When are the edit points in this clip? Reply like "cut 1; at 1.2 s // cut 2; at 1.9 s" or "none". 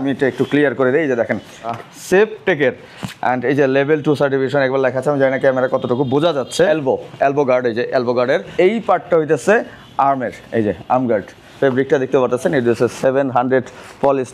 cut 1; at 1.7 s // cut 2; at 6.7 s // cut 3; at 8.5 s // cut 4; at 11.4 s